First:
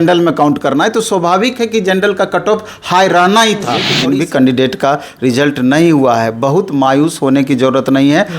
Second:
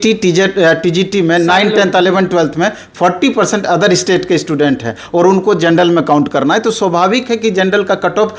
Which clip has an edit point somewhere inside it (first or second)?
first